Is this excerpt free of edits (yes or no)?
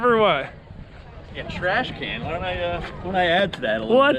yes